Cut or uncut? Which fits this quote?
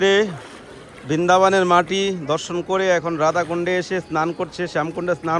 uncut